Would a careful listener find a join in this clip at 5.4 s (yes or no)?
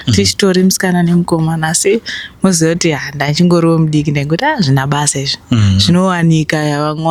no